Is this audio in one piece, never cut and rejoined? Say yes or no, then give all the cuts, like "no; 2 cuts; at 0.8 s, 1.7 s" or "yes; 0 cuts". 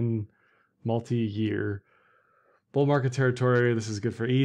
yes; 0 cuts